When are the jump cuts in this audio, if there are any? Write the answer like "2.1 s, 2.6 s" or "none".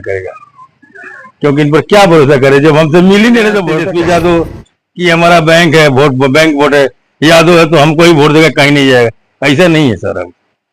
3.8 s